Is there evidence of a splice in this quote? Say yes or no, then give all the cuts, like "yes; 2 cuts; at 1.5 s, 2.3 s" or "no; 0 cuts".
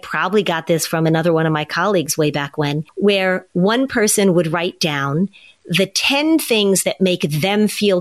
no; 0 cuts